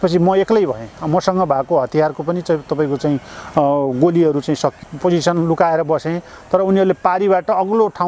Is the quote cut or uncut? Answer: cut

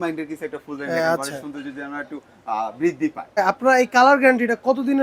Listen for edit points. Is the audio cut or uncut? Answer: cut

